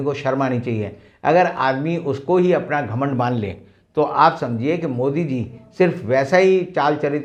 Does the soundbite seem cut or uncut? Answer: uncut